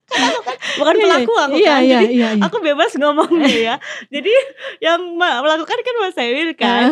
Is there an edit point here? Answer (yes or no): no